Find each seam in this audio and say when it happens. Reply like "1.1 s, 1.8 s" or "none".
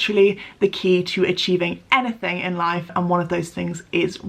2.9 s